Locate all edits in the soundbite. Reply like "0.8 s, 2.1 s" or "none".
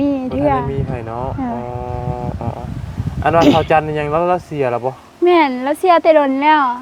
none